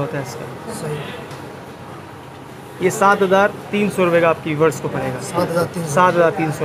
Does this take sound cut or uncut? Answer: uncut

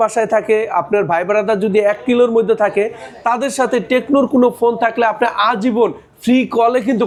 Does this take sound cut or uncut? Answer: uncut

